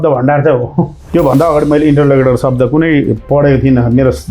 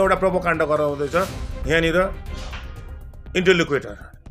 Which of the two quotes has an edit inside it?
first; 1 cut; at 1.0 s

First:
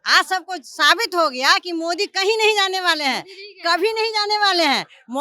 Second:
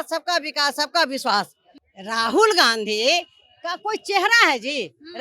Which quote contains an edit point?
second; 1 cut; at 1.7 s

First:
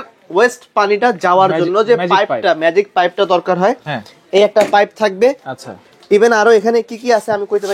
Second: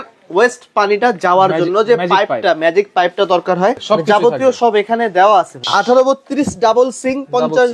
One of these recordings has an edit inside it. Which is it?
second; 2 cuts; at 3.8 s, 5.6 s

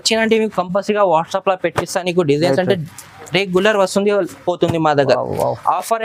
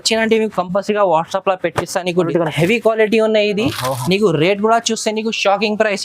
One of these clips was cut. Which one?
second; 1 cut; at 2.3 s

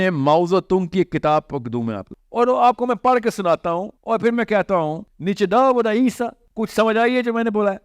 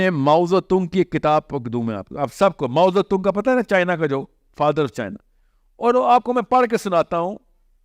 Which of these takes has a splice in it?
first; 4 cuts; at 2.0 s, 3.9 s, 5.1 s, 6.4 s

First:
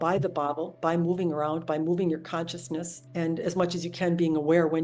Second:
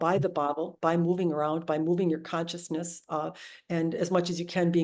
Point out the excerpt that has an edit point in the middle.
first; 1 cut; at 3.0 s

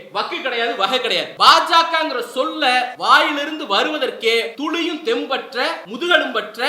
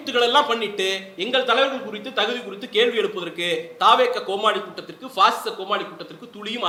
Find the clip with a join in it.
first; 4 cuts; at 1.3 s, 2.9 s, 4.5 s, 5.9 s

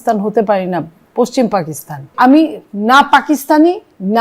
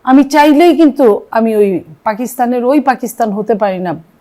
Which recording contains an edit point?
first; 1 cut; at 2.1 s

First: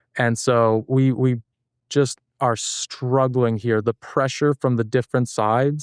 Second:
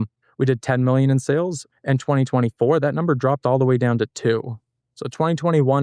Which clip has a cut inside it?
second; 1 cut; at 1.6 s

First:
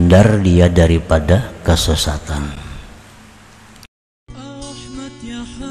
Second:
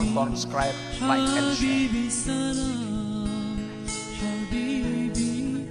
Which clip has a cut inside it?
first; 1 cut; at 4.1 s

